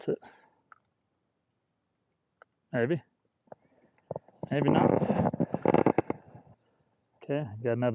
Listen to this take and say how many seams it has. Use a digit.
1